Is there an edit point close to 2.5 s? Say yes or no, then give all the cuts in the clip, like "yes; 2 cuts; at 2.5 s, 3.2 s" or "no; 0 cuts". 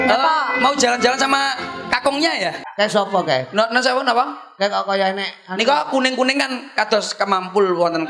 yes; 1 cut; at 2.5 s